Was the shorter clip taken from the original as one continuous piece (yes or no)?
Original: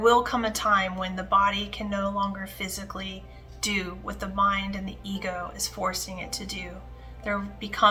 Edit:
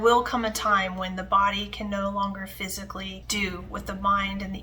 no